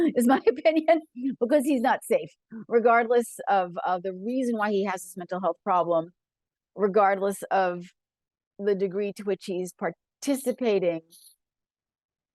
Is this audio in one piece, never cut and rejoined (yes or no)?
yes